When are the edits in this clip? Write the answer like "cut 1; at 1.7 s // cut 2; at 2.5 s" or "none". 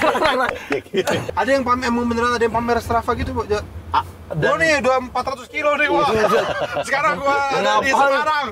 cut 1; at 1.2 s